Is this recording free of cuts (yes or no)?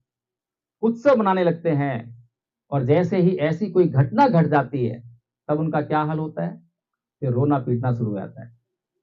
yes